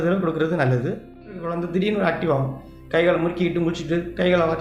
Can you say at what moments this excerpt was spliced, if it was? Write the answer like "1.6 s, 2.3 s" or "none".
1.5 s